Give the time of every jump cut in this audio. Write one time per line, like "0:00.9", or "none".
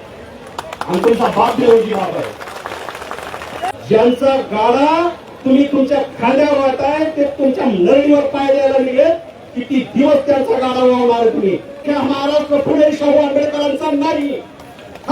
0:03.7
0:11.9